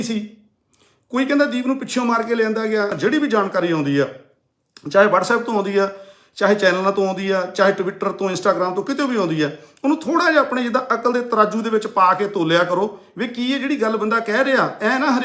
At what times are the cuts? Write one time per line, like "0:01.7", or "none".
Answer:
0:02.9

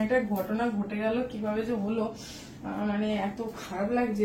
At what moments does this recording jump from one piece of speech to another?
none

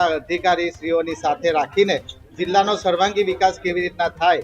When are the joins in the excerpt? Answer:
0:02.2

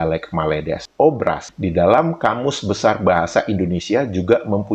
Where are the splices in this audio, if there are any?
0:01.0

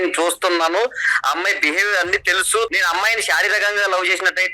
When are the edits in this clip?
0:02.7

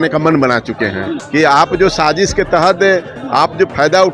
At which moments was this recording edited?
0:01.2

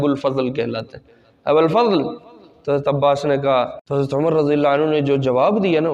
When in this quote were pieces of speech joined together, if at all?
0:03.8

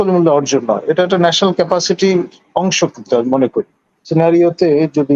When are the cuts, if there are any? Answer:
0:04.1

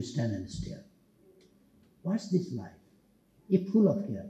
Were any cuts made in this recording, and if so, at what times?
none

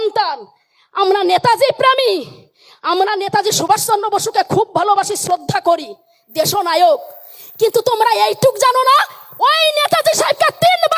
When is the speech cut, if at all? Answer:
none

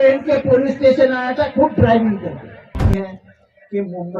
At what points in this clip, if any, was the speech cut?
0:02.8

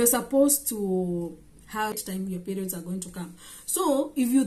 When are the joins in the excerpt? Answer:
0:01.9

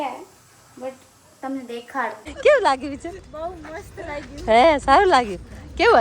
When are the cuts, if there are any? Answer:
0:02.2

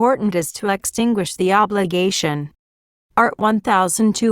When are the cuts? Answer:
0:01.6
0:03.2

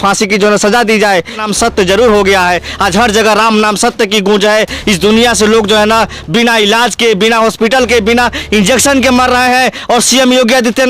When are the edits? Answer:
0:01.4

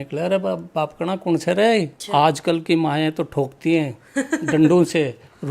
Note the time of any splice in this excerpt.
0:02.0

